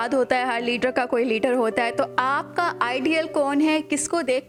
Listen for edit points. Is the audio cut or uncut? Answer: uncut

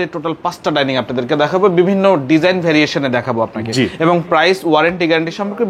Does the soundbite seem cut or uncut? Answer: uncut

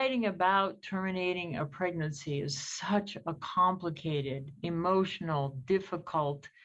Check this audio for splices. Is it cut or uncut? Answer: uncut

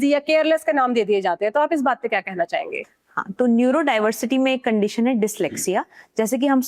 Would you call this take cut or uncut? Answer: uncut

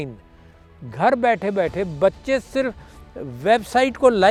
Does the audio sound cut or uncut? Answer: uncut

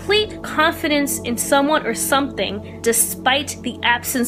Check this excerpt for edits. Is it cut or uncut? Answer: uncut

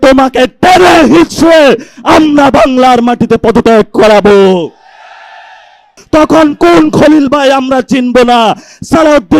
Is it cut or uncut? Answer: cut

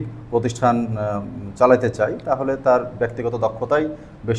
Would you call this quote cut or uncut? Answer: uncut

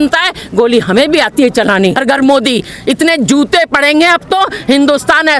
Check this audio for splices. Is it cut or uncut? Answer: cut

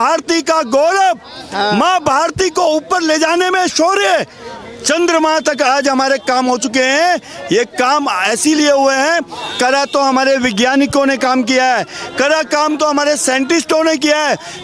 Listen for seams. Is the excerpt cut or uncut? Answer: uncut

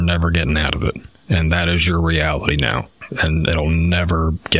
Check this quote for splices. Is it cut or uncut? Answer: uncut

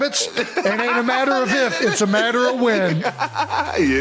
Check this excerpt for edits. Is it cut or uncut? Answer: uncut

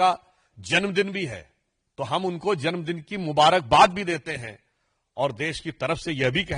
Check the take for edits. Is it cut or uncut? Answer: uncut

